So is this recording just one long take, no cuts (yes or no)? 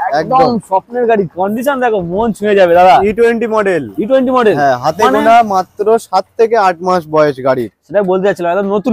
yes